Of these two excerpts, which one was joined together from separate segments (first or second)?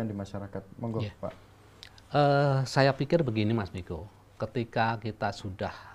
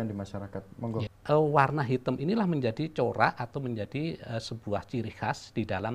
second